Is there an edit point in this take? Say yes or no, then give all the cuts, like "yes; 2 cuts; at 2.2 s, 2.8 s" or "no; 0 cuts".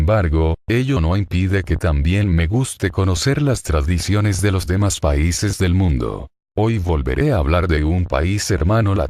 no; 0 cuts